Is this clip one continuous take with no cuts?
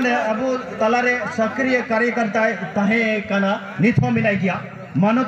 yes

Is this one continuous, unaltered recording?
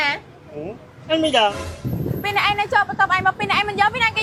yes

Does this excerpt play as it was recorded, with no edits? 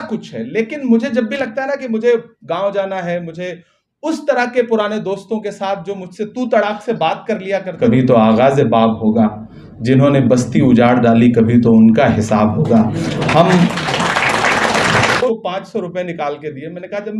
no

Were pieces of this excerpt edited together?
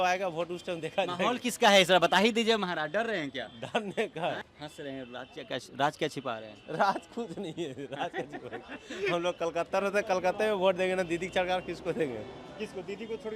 yes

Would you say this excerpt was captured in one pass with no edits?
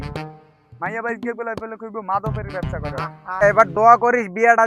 no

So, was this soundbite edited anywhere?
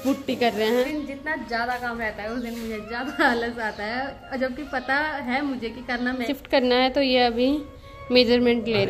yes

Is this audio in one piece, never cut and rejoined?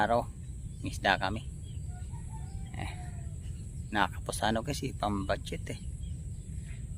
yes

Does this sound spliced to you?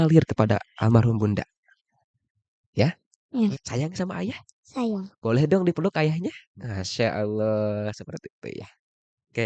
yes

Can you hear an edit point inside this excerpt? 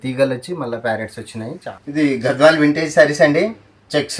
yes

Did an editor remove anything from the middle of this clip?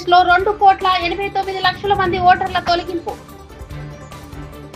no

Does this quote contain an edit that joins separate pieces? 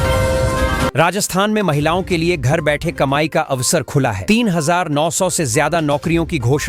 yes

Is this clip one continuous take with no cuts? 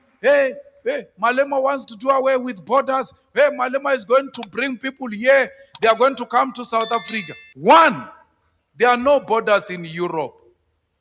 yes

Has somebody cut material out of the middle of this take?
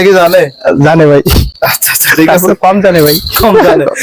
no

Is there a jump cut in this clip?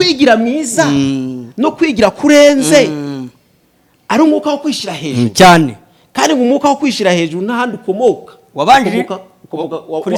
no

